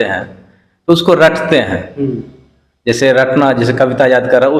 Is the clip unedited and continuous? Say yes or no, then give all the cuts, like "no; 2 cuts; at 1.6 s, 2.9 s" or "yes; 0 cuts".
yes; 0 cuts